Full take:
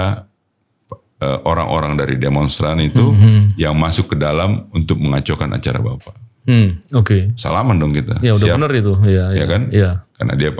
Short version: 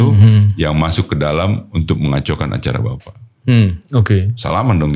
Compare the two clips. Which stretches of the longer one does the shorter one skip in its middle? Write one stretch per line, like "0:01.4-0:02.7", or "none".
none